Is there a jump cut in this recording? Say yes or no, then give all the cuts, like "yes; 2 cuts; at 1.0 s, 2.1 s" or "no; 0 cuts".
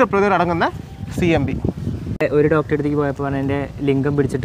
yes; 1 cut; at 2.3 s